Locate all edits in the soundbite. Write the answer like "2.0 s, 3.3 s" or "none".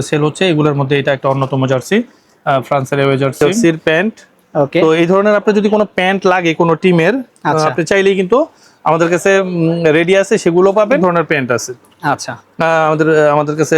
3.6 s, 11.0 s

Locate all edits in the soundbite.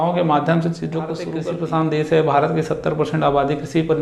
1.4 s

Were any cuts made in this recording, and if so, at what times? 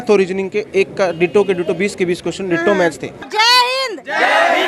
3.1 s

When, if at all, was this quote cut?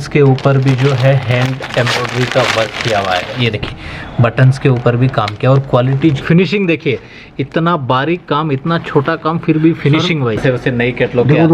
6.2 s, 10.4 s

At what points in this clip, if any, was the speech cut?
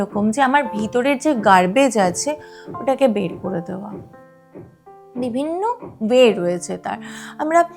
none

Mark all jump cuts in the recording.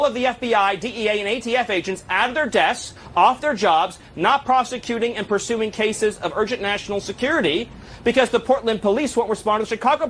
none

